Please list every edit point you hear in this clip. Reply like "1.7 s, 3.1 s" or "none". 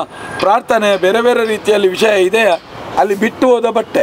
2.8 s